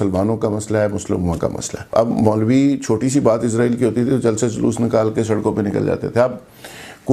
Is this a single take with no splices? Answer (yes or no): no